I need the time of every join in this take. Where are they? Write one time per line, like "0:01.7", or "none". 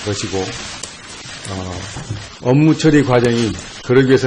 none

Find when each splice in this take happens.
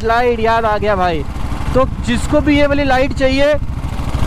none

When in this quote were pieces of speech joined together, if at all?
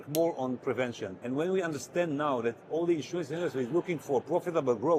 0:01.1

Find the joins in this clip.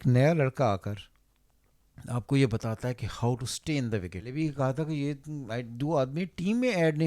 0:04.3

